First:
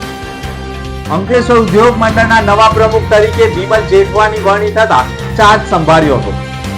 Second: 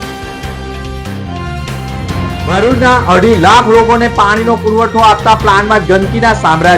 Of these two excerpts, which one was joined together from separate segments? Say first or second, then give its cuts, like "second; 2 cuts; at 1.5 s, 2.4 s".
second; 1 cut; at 1.1 s